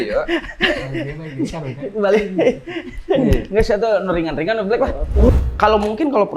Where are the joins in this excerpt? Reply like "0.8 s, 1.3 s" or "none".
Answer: 5.3 s